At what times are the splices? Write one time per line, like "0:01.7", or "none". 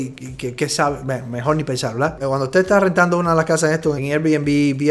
0:02.2